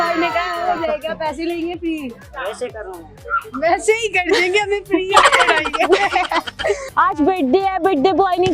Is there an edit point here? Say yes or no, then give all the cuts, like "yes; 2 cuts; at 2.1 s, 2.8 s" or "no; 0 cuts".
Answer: yes; 1 cut; at 6.9 s